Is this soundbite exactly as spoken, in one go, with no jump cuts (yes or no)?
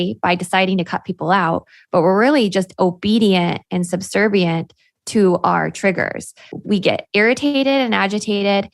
no